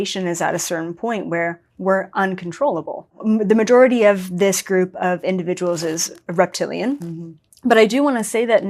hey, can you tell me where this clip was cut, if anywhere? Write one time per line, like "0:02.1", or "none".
0:03.1